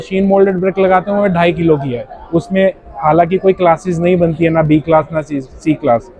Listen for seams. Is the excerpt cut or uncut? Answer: uncut